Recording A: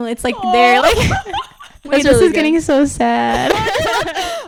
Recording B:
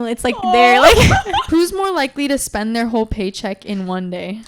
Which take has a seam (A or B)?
B